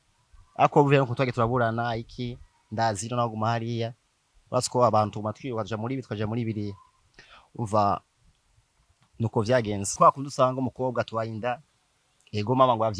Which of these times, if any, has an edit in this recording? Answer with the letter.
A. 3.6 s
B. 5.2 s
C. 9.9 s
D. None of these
C